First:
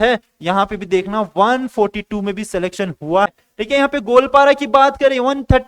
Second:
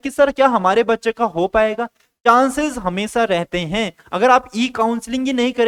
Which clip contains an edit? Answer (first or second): first